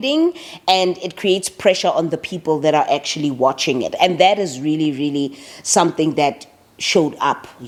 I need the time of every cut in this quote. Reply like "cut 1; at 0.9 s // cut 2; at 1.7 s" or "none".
none